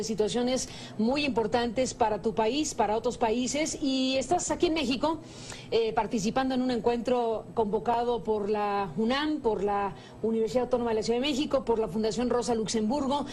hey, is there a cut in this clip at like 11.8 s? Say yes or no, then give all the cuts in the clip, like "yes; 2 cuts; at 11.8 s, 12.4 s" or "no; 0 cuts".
yes; 1 cut; at 11.8 s